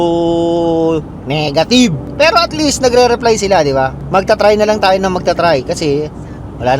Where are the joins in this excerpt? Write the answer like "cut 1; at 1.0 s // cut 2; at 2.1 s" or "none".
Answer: cut 1; at 2.0 s // cut 2; at 4.0 s